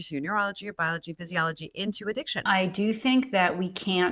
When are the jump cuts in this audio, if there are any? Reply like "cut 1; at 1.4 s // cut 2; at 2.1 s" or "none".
cut 1; at 2.4 s